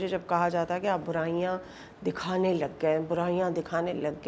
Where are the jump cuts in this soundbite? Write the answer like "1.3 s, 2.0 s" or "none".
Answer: none